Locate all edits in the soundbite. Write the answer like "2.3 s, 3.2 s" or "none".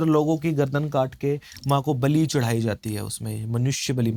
none